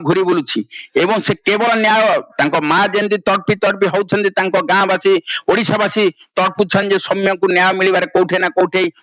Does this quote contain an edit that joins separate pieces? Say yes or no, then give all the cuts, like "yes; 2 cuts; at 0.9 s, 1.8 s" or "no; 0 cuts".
no; 0 cuts